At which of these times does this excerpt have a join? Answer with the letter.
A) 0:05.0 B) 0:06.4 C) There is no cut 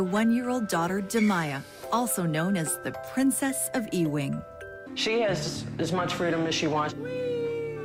C